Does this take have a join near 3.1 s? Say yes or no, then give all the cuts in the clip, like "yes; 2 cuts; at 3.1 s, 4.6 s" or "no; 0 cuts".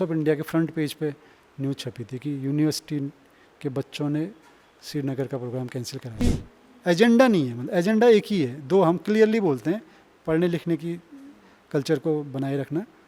no; 1 cut; at 6.2 s